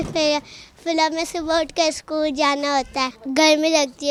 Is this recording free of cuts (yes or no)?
yes